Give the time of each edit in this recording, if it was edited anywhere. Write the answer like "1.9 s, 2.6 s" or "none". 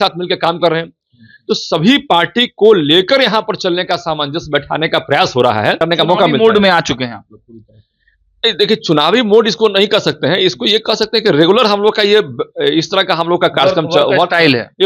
5.8 s